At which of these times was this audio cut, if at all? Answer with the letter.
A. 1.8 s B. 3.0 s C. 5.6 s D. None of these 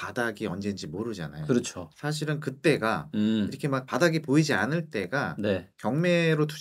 D